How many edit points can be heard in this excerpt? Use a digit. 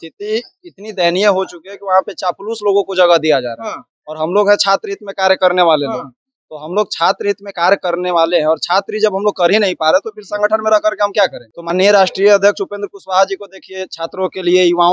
1